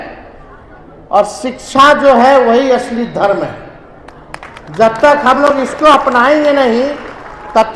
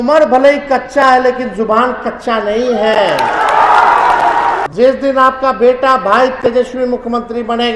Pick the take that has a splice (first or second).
second